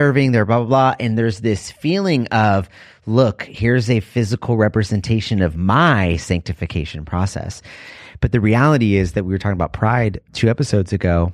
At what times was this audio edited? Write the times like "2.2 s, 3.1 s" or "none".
10.2 s